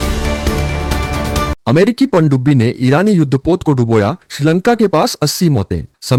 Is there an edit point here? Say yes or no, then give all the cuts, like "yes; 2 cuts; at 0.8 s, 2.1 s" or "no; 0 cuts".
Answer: no; 0 cuts